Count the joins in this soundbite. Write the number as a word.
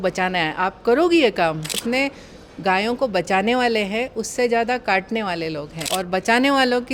two